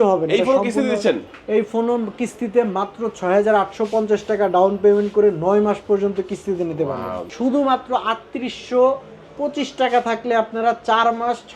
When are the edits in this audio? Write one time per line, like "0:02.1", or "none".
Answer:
0:07.2

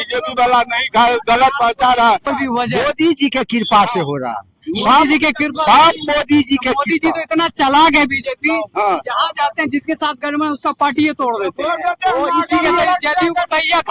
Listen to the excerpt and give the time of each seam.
0:02.3

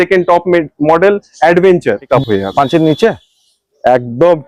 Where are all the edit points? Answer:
0:02.1

